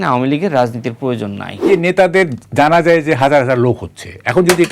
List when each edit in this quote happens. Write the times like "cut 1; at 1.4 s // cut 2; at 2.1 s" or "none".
cut 1; at 1.7 s